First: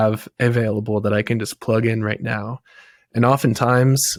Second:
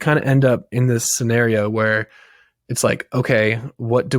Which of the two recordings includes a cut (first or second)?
second